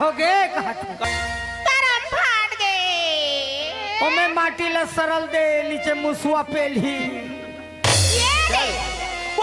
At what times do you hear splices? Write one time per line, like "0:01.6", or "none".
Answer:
0:01.0